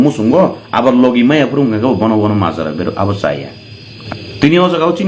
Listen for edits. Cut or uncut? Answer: cut